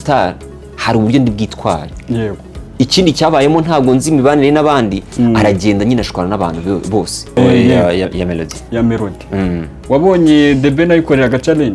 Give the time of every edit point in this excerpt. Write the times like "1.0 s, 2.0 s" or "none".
2.6 s, 7.2 s